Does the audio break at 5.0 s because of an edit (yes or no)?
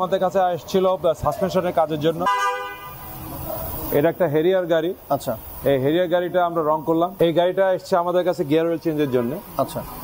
no